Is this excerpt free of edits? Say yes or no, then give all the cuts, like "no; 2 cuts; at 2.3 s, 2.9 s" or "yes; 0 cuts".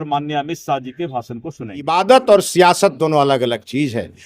no; 1 cut; at 1.9 s